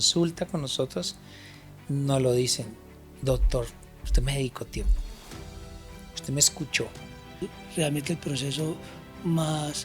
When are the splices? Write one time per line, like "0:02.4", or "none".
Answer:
0:07.4